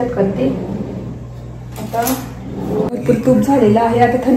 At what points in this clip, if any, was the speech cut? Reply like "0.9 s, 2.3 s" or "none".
2.9 s